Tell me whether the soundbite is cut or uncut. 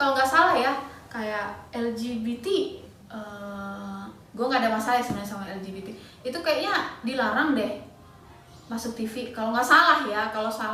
uncut